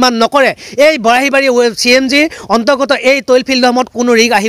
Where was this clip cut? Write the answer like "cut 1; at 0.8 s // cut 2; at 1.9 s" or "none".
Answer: none